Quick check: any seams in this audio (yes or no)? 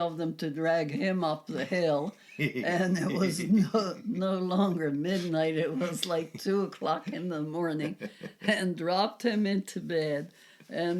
no